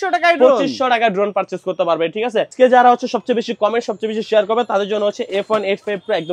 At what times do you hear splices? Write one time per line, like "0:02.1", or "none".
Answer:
0:02.5